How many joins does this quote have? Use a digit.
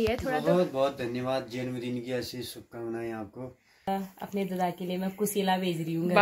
1